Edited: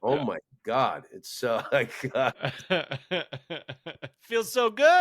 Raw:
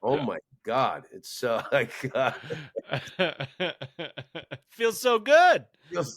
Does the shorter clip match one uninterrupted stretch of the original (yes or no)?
no